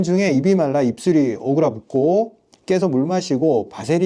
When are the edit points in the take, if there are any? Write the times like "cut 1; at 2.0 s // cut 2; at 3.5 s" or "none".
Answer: none